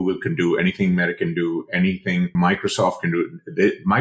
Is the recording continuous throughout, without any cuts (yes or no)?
no